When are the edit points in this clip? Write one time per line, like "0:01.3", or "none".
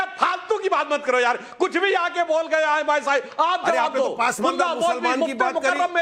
none

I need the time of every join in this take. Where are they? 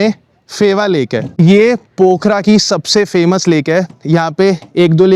none

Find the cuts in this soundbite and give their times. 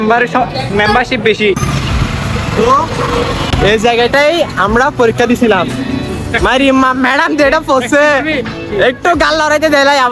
none

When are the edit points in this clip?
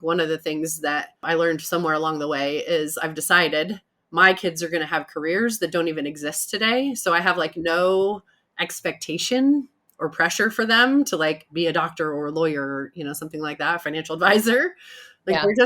0:01.2

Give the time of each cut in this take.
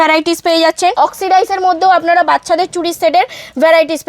0:00.9

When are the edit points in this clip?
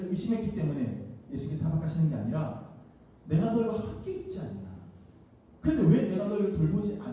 none

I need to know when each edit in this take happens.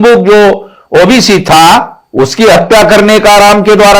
none

